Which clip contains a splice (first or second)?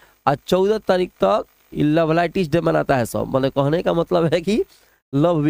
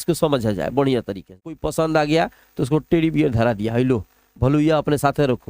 second